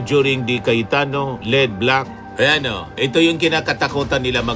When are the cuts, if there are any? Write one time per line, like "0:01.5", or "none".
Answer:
0:02.2